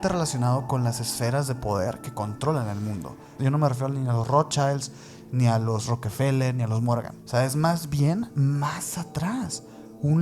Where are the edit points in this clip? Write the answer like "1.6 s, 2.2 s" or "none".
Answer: 3.3 s, 7.2 s